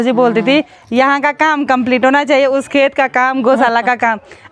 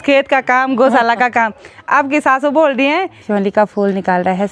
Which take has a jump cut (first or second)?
second